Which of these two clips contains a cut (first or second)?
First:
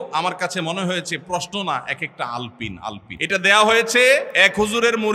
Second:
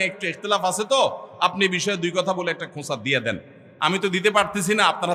first